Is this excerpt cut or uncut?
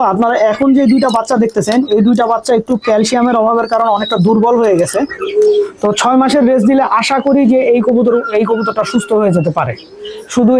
cut